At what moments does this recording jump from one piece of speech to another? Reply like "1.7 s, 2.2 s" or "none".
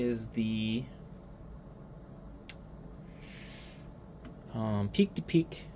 none